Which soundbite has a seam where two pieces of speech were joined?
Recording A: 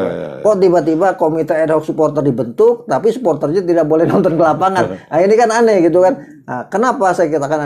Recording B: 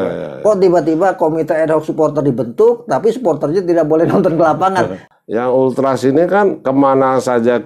B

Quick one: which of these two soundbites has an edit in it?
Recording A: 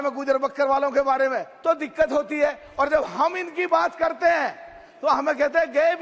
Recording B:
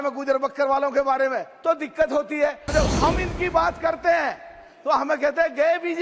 B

